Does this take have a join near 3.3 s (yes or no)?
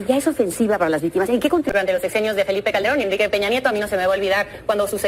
no